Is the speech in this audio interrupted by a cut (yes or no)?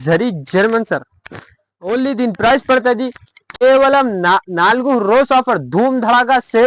yes